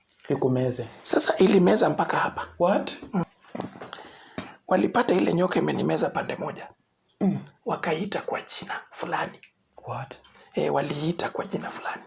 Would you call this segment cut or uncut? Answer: cut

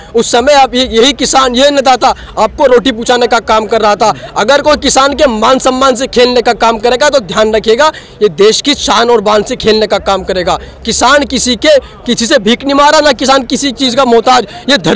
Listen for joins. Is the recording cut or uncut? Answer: uncut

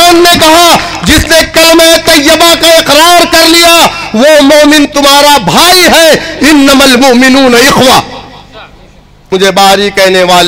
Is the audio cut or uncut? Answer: cut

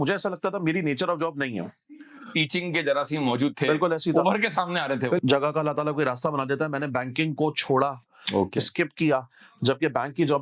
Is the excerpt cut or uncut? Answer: cut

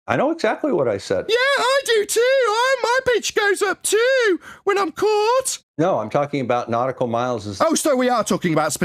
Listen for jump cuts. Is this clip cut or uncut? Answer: cut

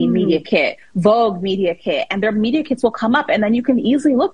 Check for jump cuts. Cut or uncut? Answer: uncut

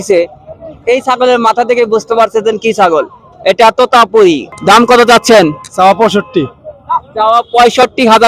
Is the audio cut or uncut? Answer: cut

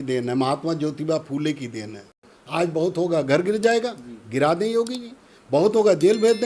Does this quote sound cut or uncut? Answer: cut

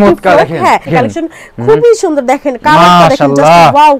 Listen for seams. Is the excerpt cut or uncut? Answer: cut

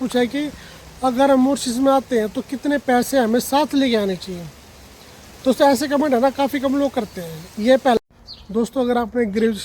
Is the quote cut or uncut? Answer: cut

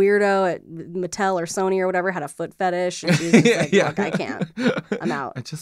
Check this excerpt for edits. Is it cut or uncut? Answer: uncut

